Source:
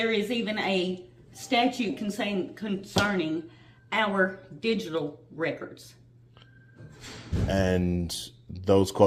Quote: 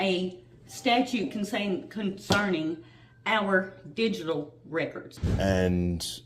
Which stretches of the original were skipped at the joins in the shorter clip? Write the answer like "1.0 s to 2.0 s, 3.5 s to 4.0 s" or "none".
5.7 s to 7.2 s